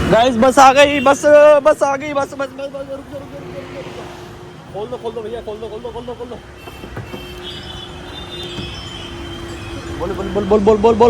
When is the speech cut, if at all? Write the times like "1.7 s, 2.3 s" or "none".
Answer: none